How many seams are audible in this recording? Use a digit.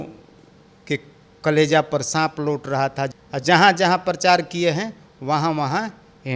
1